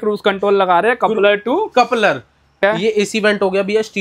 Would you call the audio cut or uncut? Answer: cut